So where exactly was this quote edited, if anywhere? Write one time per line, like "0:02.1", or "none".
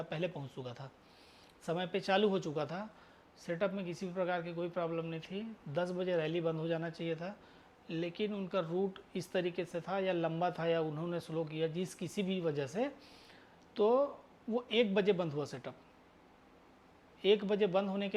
none